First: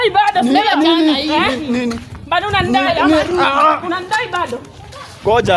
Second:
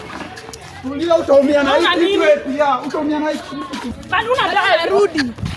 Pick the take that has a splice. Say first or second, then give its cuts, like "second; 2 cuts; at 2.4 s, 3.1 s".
second; 1 cut; at 3.9 s